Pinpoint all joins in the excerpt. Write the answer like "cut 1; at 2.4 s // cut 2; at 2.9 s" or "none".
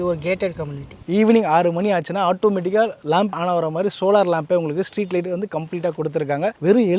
cut 1; at 1.0 s // cut 2; at 3.3 s